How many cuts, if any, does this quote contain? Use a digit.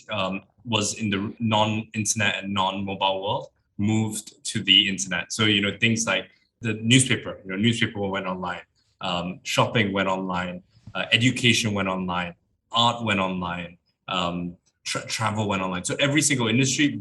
2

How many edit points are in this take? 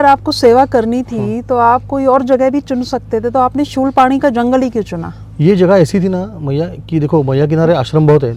0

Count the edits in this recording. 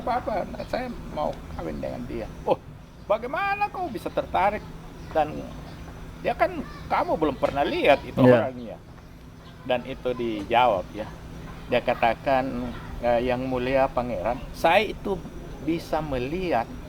1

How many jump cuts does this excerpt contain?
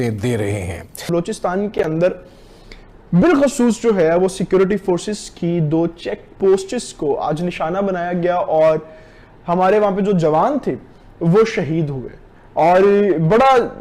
1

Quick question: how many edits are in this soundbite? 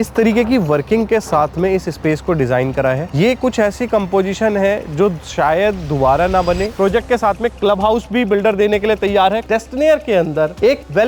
2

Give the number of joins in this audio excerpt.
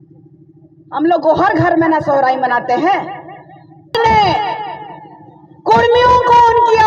1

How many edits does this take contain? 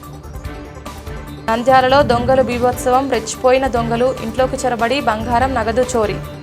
1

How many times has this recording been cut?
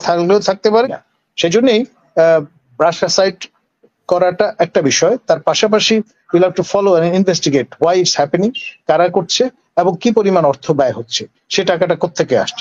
1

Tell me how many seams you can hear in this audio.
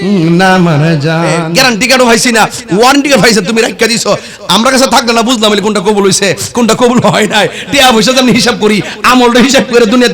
1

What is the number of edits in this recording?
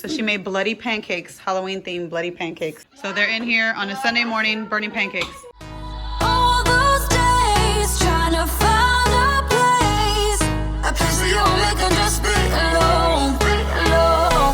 2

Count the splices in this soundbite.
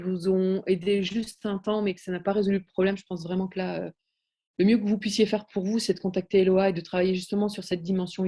0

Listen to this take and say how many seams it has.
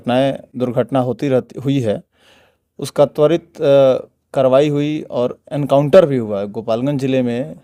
0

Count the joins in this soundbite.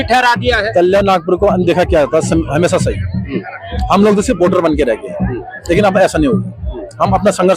0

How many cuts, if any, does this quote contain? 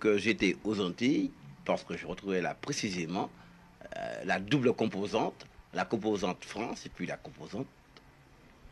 1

